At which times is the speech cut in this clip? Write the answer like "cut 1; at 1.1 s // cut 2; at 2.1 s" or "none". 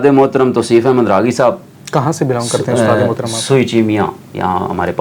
none